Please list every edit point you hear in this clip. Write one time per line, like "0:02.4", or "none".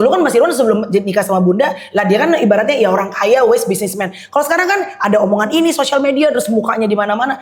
none